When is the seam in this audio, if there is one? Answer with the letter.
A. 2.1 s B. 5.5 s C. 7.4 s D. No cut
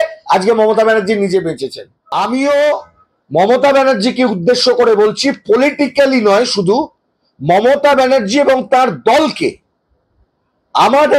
A